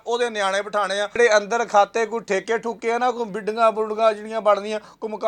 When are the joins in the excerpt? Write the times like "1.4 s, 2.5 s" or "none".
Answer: 1.2 s